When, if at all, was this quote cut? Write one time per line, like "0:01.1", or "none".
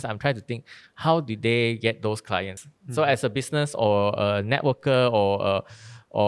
0:02.5